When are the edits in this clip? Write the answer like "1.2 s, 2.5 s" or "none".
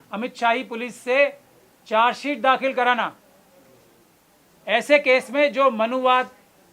none